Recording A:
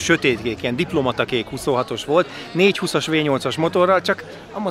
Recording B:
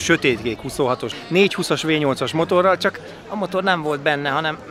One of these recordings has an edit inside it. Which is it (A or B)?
B